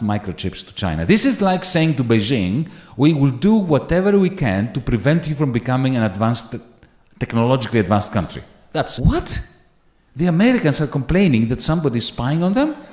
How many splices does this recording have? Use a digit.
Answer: 1